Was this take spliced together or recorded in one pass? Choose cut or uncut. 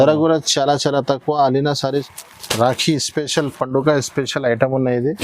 cut